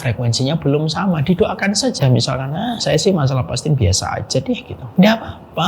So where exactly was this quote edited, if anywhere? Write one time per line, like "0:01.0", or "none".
0:04.8